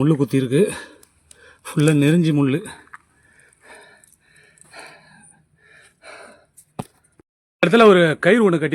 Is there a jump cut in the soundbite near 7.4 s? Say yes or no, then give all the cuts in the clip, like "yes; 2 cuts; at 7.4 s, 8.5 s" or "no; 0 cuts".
yes; 1 cut; at 7.4 s